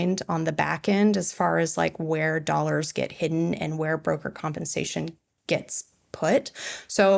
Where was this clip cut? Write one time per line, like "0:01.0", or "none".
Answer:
0:05.3